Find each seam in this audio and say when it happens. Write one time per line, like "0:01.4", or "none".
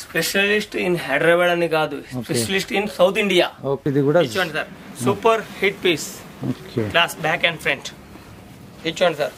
0:03.8